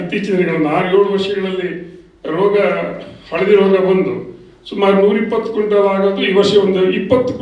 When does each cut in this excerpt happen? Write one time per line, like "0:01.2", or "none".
none